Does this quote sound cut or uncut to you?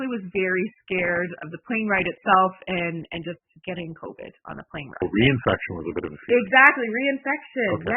cut